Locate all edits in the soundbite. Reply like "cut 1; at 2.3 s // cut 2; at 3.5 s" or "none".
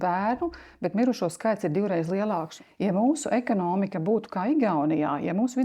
cut 1; at 2.5 s